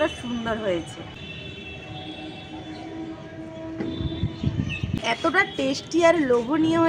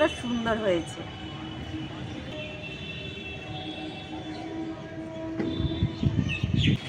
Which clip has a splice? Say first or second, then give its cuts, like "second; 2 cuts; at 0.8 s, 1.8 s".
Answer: first; 2 cuts; at 1.2 s, 4.9 s